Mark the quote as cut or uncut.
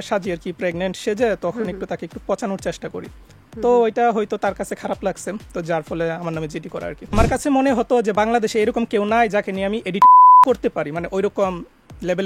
cut